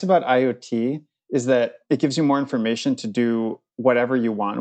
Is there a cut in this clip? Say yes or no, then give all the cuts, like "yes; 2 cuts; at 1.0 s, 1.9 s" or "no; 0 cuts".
yes; 1 cut; at 1.8 s